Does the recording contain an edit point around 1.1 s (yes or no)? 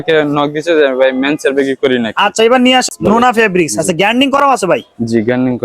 no